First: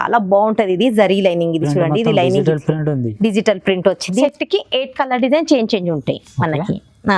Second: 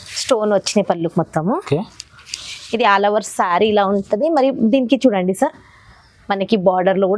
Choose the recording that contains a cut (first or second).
first